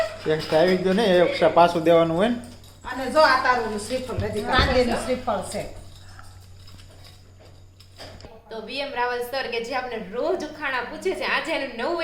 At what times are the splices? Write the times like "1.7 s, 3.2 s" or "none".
4.5 s, 8.3 s

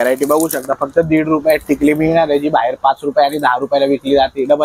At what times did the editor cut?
none

